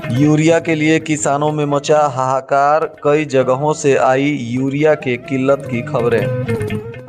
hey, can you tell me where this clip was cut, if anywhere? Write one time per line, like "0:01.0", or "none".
none